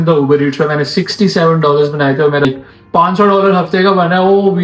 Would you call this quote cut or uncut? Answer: cut